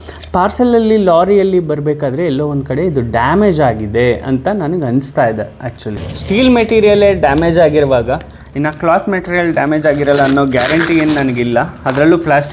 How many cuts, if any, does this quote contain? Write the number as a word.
one